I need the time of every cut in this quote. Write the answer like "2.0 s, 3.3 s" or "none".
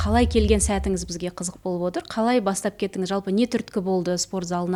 none